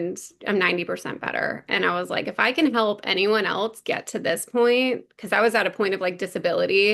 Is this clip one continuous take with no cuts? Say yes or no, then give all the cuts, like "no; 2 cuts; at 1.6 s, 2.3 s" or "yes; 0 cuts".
yes; 0 cuts